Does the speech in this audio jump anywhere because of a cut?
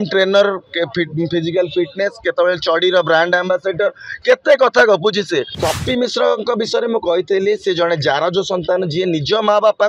yes; 1 cut; at 5.5 s

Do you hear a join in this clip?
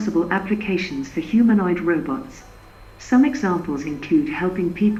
no; 0 cuts

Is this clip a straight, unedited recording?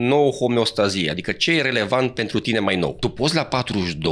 no; 1 cut; at 3.0 s

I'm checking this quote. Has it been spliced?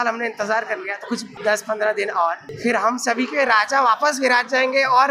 yes; 2 cuts; at 1.3 s, 2.5 s

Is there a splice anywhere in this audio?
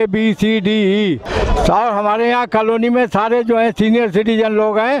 yes; 1 cut; at 1.2 s

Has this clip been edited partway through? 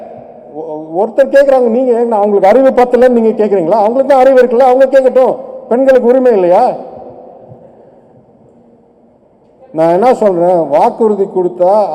no; 0 cuts

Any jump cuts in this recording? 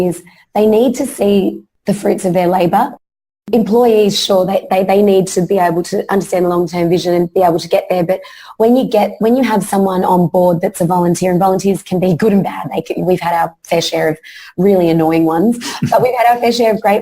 yes; 2 cuts; at 1.7 s, 3.3 s

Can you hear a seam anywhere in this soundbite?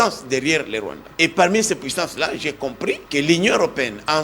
yes; 2 cuts; at 1.0 s, 3.0 s

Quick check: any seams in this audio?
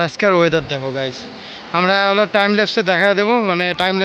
no; 0 cuts

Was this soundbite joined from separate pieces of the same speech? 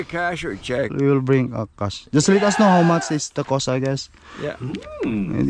yes; 1 cut; at 0.9 s

